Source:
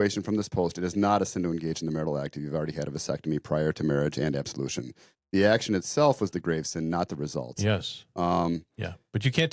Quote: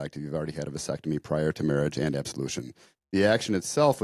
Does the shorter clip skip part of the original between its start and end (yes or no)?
no